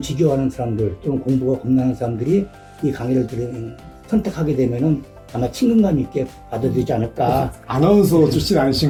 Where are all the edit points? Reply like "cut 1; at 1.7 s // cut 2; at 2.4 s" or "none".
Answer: none